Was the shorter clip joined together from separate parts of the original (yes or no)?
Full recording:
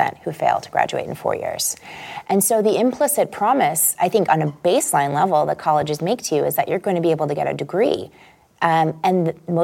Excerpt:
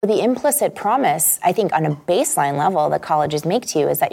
no